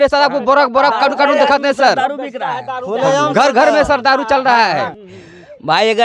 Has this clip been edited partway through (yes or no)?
yes